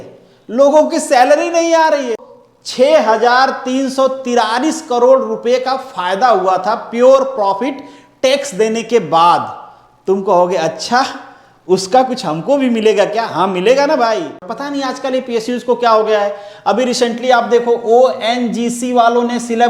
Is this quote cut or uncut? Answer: cut